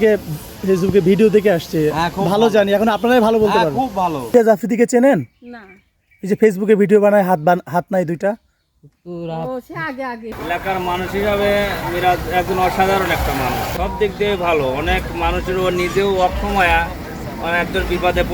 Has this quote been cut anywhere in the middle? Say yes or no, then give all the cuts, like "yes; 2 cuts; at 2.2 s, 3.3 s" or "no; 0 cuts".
yes; 3 cuts; at 4.3 s, 10.3 s, 13.7 s